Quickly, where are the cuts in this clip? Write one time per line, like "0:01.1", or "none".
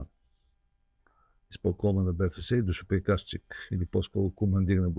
none